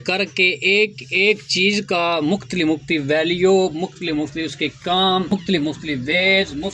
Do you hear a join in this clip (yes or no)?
yes